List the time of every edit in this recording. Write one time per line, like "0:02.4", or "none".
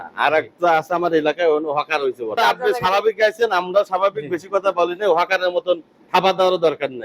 0:02.3